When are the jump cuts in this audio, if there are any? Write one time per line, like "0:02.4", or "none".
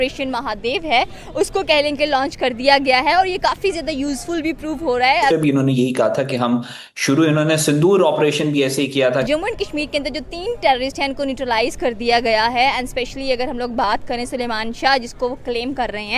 0:05.3
0:09.3